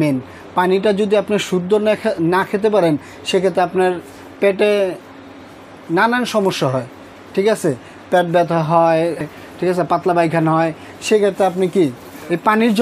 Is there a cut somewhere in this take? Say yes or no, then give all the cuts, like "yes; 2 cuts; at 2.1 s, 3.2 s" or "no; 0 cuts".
no; 0 cuts